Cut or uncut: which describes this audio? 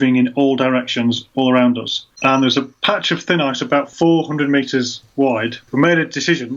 cut